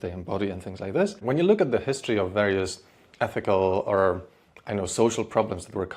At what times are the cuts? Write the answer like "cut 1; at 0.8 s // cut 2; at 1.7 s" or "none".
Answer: cut 1; at 1.2 s